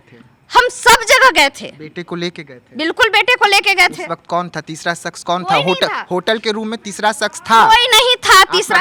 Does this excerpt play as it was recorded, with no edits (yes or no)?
yes